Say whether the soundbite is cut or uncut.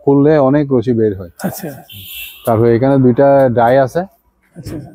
uncut